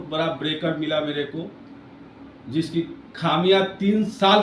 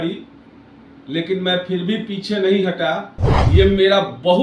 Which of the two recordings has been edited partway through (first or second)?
second